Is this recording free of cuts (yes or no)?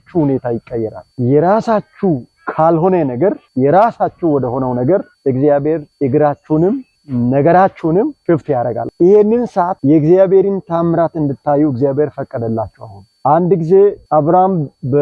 yes